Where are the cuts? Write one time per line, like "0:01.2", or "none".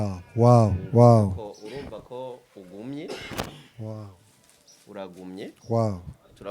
0:05.6